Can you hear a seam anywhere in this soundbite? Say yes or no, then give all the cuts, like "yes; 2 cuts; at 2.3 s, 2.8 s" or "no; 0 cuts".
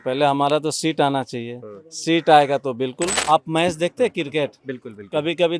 yes; 1 cut; at 3.1 s